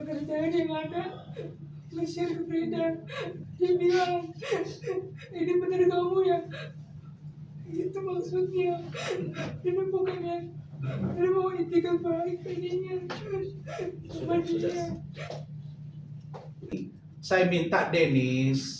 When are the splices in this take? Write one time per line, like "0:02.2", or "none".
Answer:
0:16.8